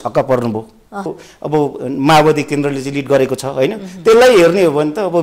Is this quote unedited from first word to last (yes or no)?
no